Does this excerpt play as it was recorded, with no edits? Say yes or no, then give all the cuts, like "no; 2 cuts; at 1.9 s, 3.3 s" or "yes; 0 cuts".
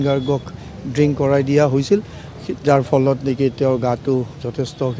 yes; 0 cuts